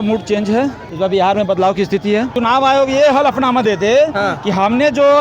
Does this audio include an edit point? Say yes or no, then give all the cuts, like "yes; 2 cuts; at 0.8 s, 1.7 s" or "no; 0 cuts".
yes; 2 cuts; at 0.9 s, 2.3 s